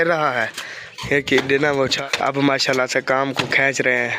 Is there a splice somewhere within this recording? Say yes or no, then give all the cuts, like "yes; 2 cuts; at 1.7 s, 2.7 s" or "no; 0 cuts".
yes; 1 cut; at 2.0 s